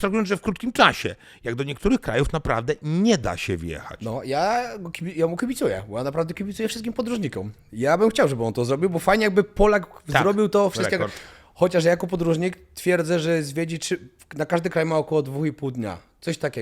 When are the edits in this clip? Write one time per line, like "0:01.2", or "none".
none